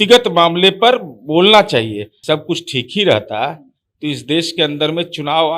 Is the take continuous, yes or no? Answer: no